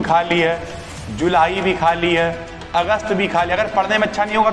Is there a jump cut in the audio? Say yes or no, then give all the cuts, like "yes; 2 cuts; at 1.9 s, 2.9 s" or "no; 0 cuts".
no; 0 cuts